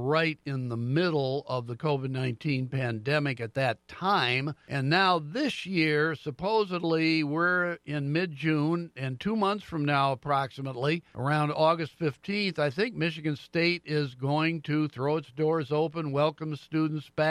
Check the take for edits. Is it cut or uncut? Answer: cut